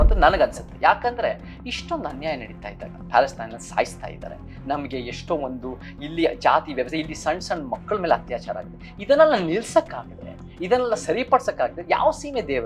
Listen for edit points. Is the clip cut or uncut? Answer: uncut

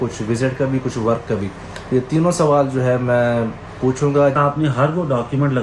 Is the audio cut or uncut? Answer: cut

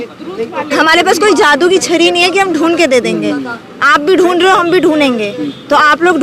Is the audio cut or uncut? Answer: uncut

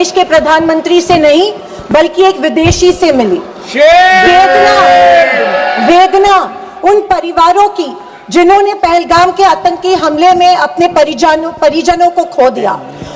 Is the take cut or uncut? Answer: uncut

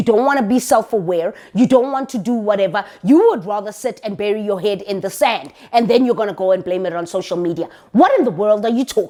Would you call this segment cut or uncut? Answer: uncut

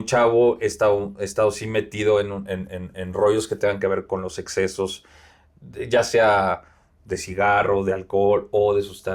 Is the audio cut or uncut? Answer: uncut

